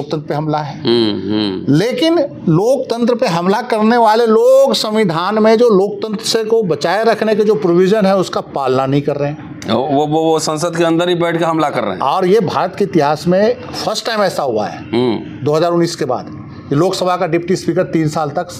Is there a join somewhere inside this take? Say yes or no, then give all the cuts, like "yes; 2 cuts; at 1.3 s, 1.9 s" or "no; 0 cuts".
no; 0 cuts